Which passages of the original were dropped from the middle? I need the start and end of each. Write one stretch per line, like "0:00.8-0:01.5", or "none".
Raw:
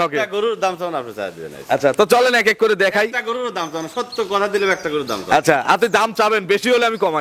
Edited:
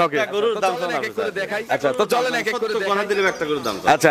0:02.7-0:04.2